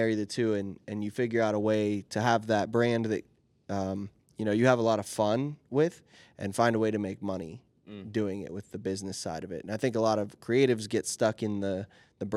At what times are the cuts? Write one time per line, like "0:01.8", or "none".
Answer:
none

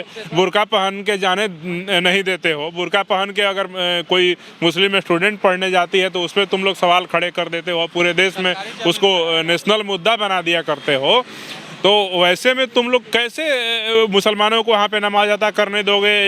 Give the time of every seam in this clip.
none

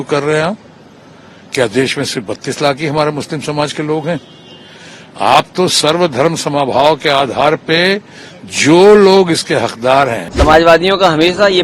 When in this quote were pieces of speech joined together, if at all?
0:10.3

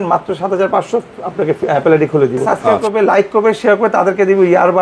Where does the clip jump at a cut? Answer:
0:02.4

